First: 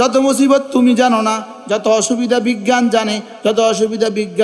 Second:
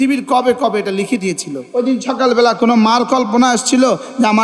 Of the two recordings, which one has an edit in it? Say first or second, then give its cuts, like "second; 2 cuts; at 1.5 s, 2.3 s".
second; 1 cut; at 1.5 s